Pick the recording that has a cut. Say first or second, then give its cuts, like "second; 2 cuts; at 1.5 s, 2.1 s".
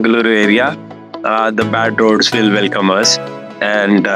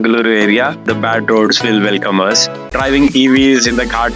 second; 2 cuts; at 0.8 s, 2.7 s